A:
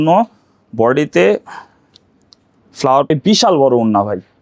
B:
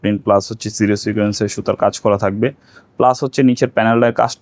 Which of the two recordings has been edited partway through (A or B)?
A